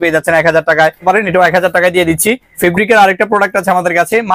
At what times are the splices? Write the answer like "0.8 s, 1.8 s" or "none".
1.0 s, 2.6 s